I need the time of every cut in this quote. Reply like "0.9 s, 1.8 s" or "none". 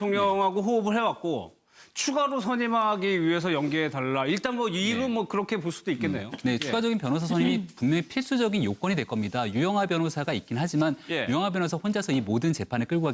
none